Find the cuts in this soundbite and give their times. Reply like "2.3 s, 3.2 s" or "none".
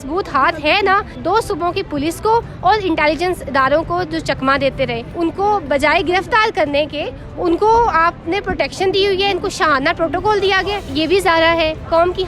1.1 s, 5.0 s, 10.9 s